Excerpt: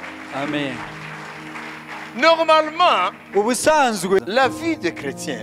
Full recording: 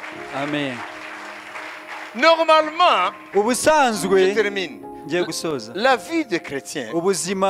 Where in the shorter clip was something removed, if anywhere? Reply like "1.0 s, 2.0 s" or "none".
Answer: 4.2 s